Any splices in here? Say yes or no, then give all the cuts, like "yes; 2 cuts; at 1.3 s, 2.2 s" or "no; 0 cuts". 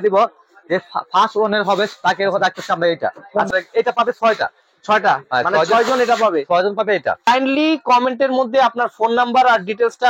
yes; 2 cuts; at 3.5 s, 7.2 s